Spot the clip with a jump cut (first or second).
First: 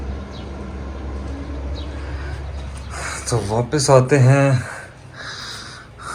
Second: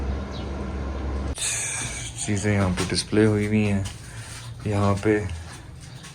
second